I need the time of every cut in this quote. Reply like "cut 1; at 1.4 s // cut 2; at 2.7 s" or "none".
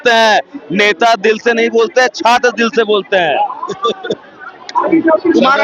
none